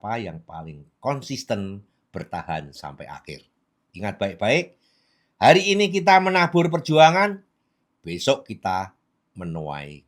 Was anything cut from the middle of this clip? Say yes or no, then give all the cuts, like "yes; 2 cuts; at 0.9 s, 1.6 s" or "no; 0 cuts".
no; 0 cuts